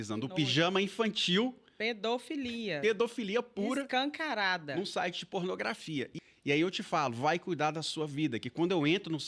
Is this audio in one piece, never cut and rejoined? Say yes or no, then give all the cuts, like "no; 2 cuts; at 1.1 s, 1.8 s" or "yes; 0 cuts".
no; 1 cut; at 6.1 s